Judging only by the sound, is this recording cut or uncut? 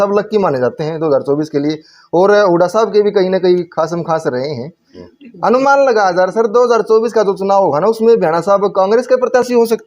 uncut